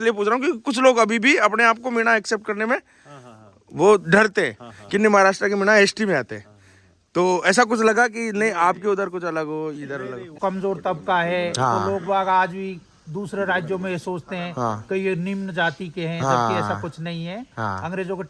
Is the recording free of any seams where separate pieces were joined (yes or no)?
no